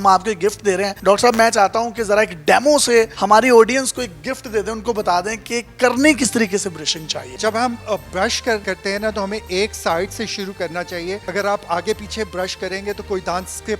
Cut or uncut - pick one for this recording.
cut